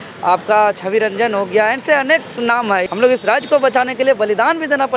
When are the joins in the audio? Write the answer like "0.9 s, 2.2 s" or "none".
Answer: 2.8 s